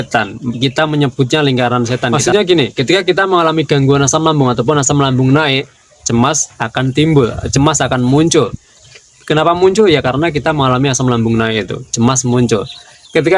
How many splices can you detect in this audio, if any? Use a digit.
1